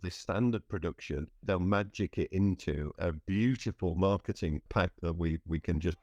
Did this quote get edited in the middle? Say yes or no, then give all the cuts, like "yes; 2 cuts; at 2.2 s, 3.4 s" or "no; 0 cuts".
yes; 3 cuts; at 1.4 s, 2.9 s, 4.7 s